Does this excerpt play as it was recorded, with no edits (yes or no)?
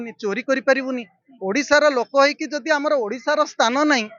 yes